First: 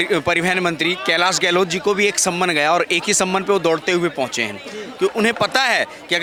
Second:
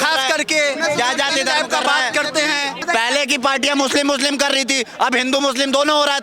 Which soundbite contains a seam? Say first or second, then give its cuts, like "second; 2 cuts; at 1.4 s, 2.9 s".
second; 1 cut; at 2.8 s